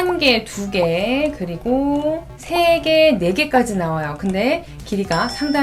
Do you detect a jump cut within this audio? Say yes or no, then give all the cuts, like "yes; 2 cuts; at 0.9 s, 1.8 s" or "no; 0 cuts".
no; 0 cuts